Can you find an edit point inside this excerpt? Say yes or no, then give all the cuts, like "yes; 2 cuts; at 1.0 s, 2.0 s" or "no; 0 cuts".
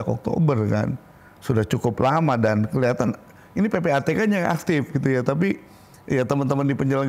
no; 0 cuts